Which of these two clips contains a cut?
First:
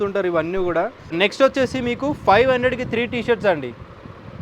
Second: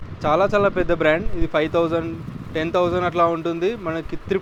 first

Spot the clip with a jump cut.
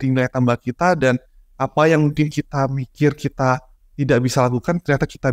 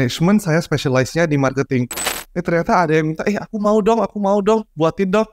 second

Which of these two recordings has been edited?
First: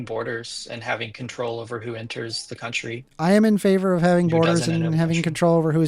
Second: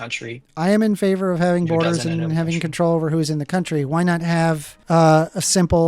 second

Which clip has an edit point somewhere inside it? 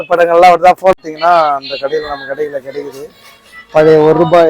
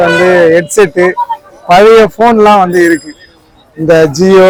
first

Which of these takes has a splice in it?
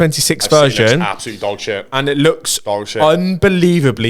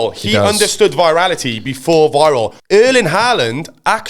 second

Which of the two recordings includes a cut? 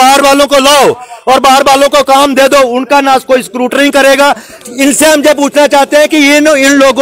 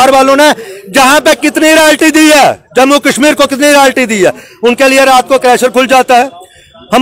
first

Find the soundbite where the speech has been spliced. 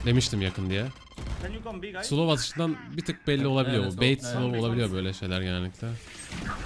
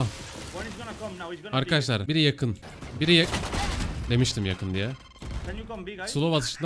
second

